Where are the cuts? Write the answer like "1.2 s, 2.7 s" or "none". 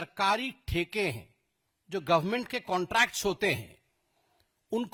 none